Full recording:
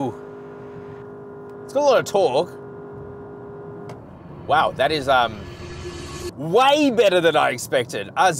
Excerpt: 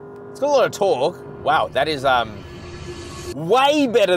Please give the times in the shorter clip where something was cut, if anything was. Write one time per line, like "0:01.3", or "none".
0:01.3